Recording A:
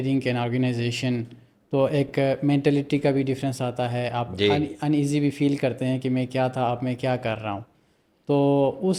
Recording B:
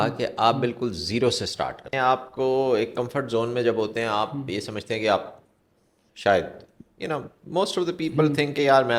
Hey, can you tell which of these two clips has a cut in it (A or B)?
B